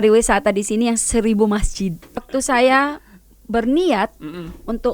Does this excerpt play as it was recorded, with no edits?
no; 1 cut; at 2.2 s

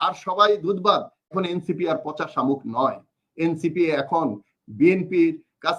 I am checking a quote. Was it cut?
yes; 1 cut; at 1.3 s

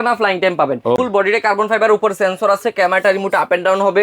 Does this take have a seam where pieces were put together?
yes; 1 cut; at 1.0 s

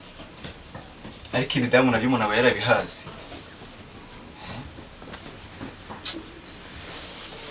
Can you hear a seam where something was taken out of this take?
no; 0 cuts

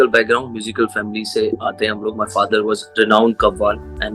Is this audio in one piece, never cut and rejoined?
no; 2 cuts; at 1.5 s, 2.9 s

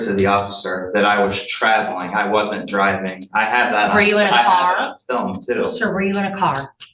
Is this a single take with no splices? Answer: yes; 0 cuts

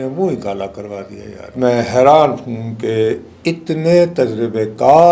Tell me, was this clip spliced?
yes; 1 cut; at 1.5 s

